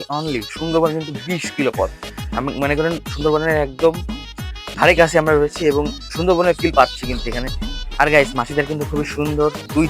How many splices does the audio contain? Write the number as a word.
one